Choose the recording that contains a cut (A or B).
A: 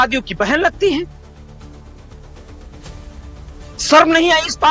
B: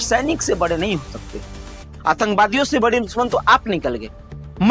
B